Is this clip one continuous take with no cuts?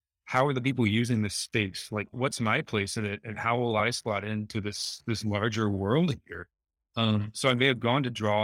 yes; 0 cuts

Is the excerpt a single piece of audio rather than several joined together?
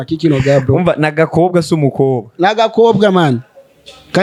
yes; 0 cuts

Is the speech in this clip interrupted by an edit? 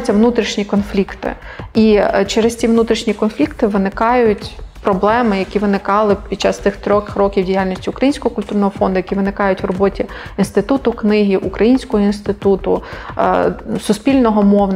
no; 0 cuts

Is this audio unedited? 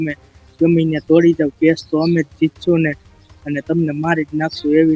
yes; 0 cuts

